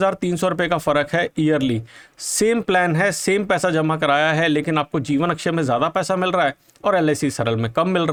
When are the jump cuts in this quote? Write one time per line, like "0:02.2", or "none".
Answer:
none